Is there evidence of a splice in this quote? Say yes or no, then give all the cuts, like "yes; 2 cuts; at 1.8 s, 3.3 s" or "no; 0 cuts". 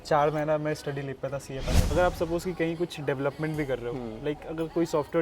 yes; 1 cut; at 1.8 s